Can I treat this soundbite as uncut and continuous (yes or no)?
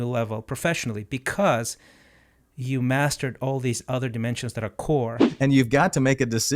no